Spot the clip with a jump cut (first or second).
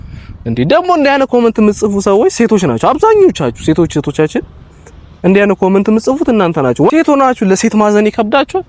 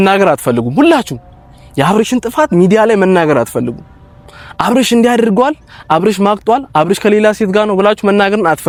first